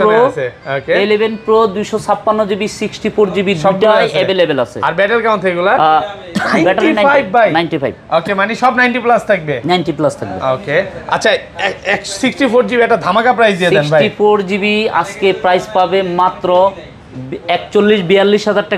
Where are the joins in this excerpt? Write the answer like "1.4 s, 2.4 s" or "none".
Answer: none